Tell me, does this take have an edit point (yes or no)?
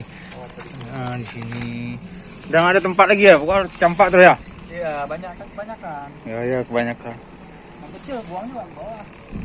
no